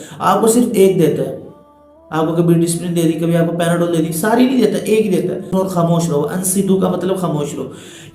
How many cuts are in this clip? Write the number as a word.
one